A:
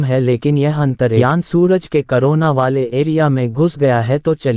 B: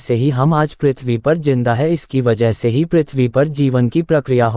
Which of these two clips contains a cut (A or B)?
A